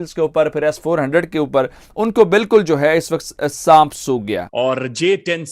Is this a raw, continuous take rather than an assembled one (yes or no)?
no